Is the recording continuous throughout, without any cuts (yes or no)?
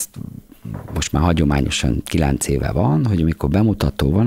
yes